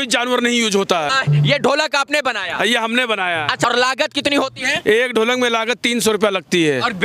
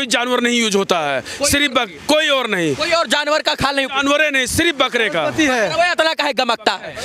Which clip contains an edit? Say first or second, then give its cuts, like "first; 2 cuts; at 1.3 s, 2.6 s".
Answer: first; 2 cuts; at 1.1 s, 3.6 s